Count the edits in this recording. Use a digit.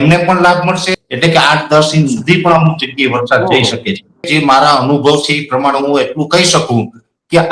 2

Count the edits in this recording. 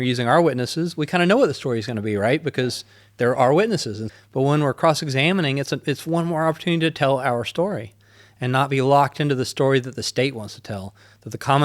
1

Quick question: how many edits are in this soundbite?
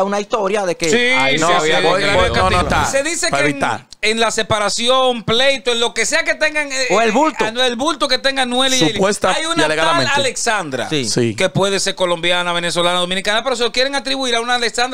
1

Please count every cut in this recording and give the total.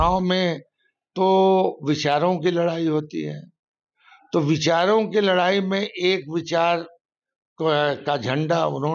0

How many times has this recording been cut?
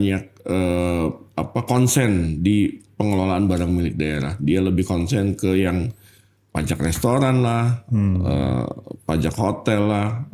0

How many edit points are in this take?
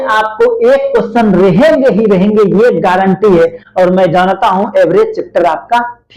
0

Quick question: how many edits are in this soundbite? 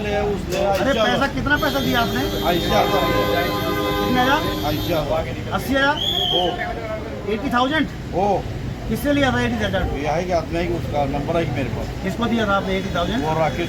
0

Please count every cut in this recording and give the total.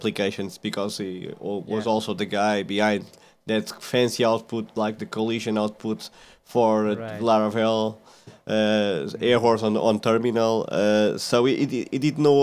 0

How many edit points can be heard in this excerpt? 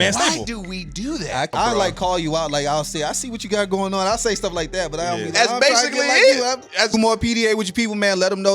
2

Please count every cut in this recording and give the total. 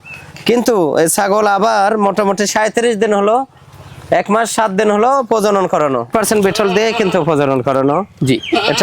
1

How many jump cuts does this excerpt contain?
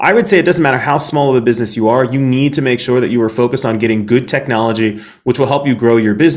0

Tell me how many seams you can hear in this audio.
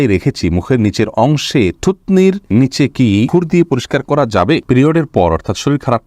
3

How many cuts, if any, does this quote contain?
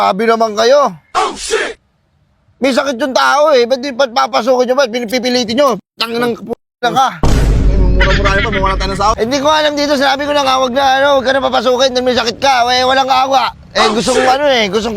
1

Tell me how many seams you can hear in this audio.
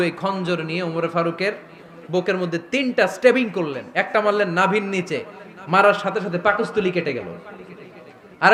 0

